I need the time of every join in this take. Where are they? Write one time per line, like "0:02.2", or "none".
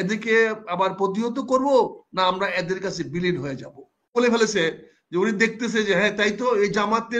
0:04.2